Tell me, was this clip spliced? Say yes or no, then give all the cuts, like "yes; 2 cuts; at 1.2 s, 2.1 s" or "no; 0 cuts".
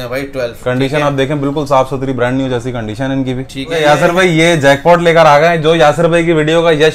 yes; 1 cut; at 3.8 s